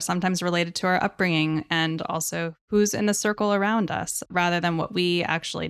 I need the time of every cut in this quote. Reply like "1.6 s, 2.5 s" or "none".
2.6 s, 4.2 s